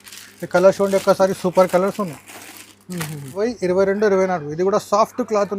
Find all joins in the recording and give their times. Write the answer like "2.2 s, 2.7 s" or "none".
3.4 s